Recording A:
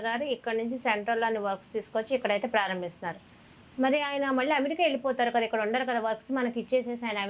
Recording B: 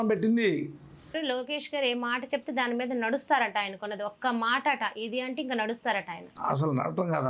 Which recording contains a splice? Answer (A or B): B